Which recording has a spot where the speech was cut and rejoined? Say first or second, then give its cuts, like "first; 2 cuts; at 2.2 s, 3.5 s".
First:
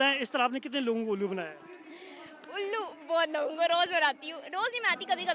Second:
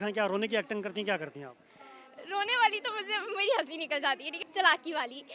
second; 1 cut; at 4.4 s